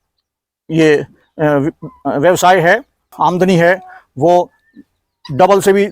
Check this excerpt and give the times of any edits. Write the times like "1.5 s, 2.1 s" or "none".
3.0 s